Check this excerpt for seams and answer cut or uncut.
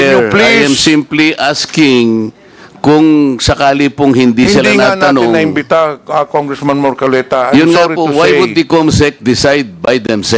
uncut